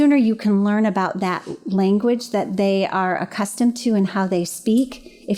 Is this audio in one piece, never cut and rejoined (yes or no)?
yes